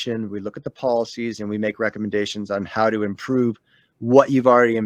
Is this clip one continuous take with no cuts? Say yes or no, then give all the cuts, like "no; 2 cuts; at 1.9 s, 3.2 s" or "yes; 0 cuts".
yes; 0 cuts